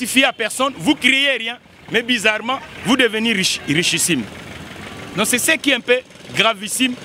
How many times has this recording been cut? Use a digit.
0